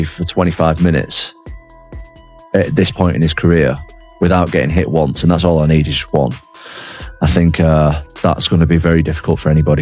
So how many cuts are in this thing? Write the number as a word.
zero